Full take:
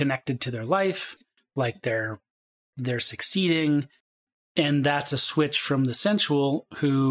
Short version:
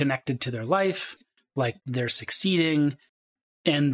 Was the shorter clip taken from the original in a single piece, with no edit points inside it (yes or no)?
no